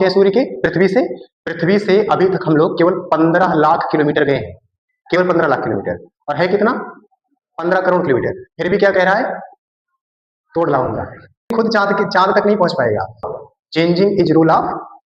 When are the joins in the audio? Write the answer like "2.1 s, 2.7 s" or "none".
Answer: 11.5 s, 13.3 s